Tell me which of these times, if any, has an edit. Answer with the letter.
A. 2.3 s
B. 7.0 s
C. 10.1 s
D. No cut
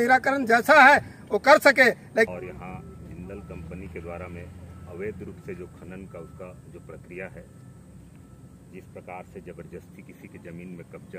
A